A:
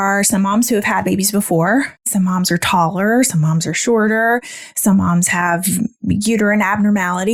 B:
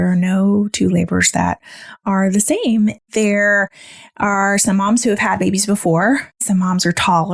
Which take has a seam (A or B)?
B